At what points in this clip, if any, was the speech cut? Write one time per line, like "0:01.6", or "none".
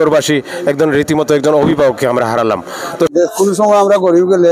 0:03.1